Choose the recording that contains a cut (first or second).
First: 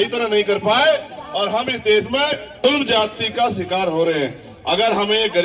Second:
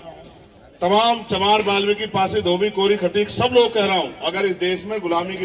first